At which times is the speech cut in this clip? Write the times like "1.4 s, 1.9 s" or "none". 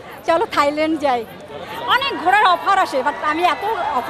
none